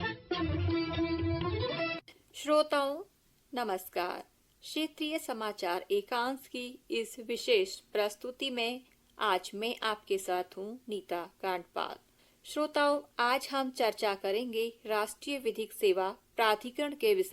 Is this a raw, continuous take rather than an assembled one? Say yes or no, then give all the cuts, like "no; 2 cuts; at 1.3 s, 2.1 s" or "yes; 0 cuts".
no; 1 cut; at 2.2 s